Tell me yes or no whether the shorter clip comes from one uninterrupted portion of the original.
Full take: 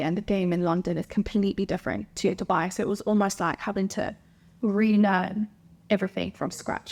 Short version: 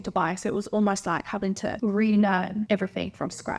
no